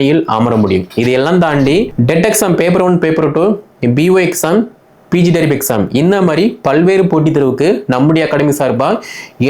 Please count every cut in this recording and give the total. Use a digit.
1